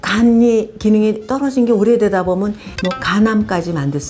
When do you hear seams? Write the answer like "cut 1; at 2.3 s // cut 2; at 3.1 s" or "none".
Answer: cut 1; at 2.7 s